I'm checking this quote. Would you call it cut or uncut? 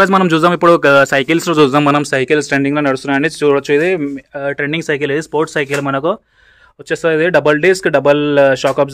uncut